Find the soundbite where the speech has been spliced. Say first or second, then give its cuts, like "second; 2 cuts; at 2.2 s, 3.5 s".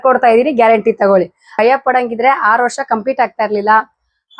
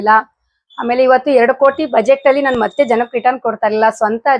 first; 1 cut; at 1.5 s